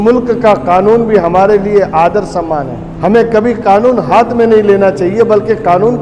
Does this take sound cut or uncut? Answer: cut